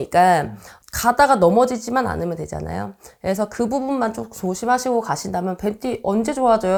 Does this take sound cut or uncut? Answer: uncut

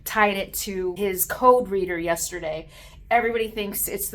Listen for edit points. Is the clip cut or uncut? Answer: cut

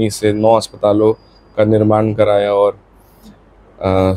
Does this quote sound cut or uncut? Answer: uncut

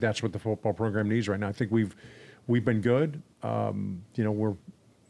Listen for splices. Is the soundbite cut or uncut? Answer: uncut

